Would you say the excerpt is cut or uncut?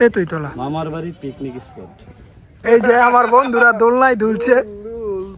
cut